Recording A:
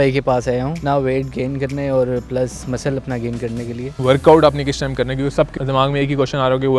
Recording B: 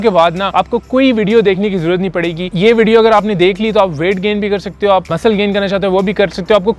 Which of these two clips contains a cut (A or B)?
A